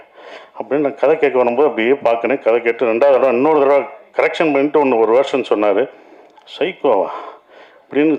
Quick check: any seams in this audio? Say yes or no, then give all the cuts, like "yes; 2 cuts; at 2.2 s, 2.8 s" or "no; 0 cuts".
no; 0 cuts